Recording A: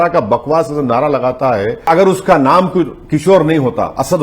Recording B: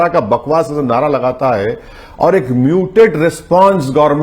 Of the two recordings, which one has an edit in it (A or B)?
A